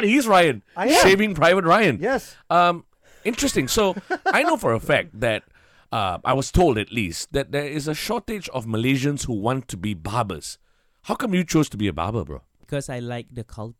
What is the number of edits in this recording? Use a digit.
1